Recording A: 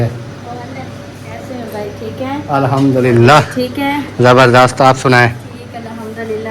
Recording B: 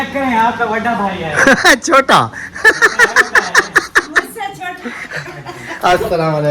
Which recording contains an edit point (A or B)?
A